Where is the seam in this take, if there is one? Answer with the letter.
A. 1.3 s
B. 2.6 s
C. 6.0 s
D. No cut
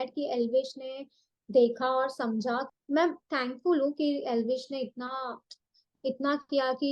B